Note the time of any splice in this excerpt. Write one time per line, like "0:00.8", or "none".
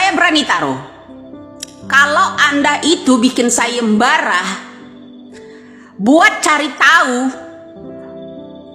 none